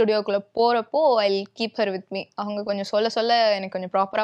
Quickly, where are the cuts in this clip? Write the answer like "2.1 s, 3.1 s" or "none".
none

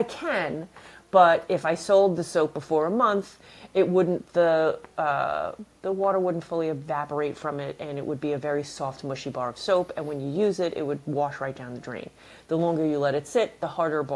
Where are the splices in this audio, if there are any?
none

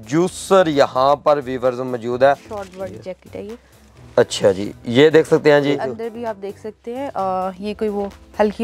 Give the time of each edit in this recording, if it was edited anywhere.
2.5 s, 5.9 s

